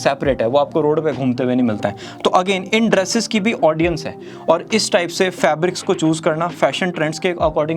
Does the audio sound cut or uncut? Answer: uncut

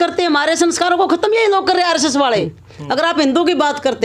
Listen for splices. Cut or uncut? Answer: cut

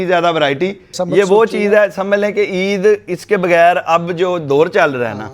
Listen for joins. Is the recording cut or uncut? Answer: cut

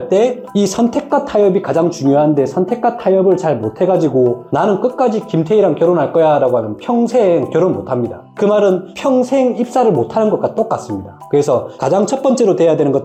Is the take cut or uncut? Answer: uncut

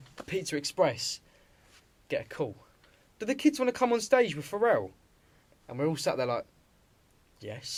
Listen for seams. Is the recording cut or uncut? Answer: uncut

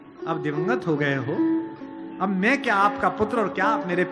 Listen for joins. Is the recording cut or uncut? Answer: uncut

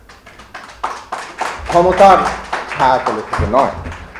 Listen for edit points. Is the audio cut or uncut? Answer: uncut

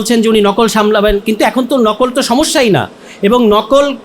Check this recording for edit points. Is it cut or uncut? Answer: uncut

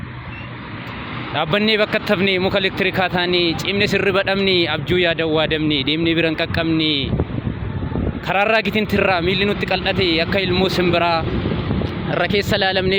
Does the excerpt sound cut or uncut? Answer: uncut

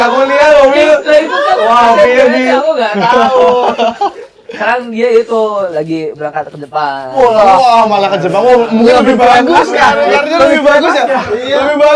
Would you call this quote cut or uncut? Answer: uncut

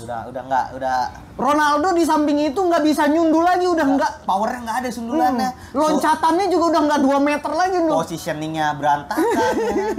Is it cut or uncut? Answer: uncut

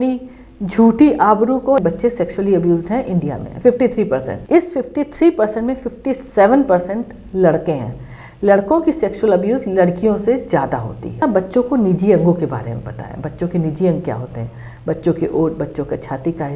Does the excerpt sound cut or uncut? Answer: cut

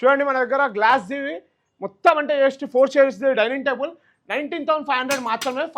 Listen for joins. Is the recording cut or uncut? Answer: uncut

